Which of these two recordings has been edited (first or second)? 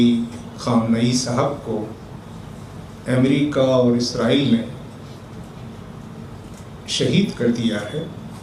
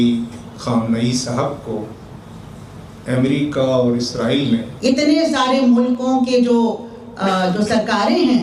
second